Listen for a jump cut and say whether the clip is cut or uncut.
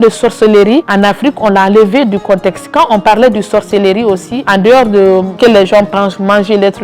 cut